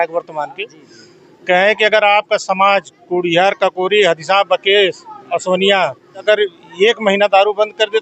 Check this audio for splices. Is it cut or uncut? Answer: cut